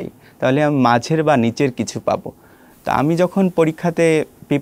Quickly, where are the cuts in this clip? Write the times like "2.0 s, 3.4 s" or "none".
none